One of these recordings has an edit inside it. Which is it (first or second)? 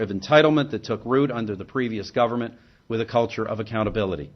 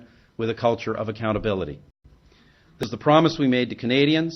first